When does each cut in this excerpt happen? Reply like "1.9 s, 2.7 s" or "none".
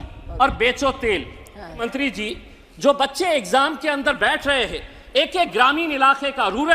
1.8 s